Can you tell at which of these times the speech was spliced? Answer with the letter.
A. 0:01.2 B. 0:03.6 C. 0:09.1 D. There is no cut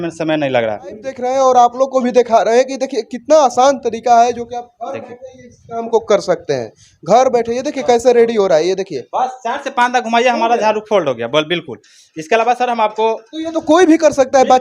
A